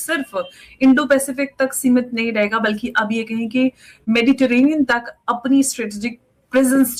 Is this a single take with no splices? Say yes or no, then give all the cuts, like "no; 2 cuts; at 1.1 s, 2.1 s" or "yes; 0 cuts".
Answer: yes; 0 cuts